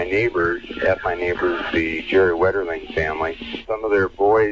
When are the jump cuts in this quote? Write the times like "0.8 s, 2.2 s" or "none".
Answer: 3.5 s